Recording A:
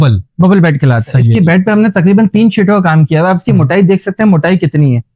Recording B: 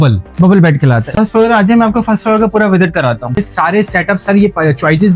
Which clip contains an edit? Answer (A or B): B